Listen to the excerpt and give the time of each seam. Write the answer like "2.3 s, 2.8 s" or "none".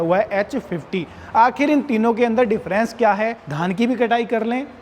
3.4 s